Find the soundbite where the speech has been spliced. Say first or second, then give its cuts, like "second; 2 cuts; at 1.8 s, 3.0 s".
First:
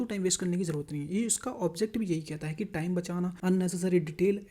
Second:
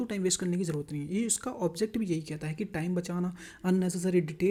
first; 1 cut; at 3.4 s